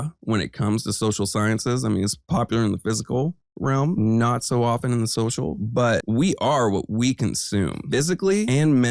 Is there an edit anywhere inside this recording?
no; 0 cuts

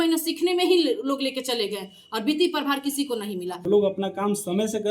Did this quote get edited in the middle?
yes; 1 cut; at 3.5 s

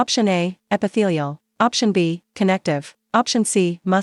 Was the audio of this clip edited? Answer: no; 0 cuts

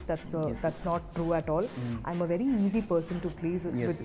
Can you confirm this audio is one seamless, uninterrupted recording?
yes; 0 cuts

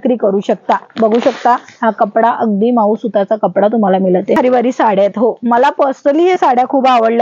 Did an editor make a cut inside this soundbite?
yes; 1 cut; at 4.4 s

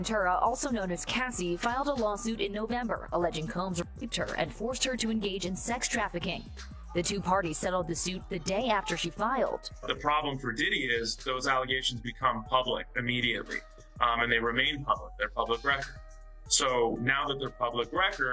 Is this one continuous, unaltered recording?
yes; 0 cuts

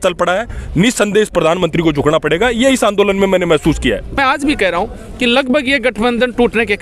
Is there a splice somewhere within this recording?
yes; 1 cut; at 4.2 s

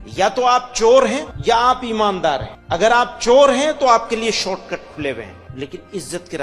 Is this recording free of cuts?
no; 3 cuts; at 1.3 s, 2.5 s, 5.4 s

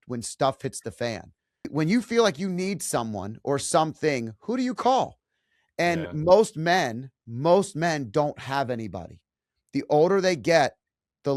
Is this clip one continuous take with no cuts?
no; 1 cut; at 1.7 s

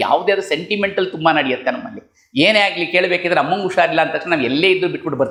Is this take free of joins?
yes; 0 cuts

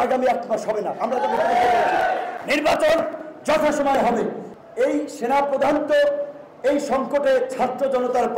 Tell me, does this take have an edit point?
yes; 1 cut; at 4.5 s

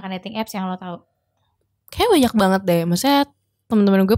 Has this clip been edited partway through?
no; 0 cuts

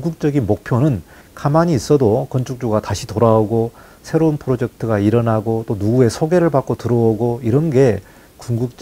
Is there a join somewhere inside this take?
no; 0 cuts

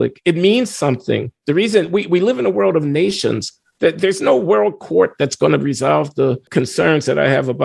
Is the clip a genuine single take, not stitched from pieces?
no; 1 cut; at 6.5 s

